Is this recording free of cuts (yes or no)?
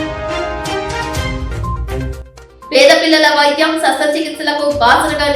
no